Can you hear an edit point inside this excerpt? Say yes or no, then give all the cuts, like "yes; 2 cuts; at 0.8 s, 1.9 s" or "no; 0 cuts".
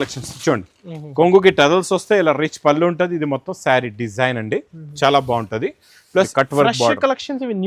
yes; 1 cut; at 6.3 s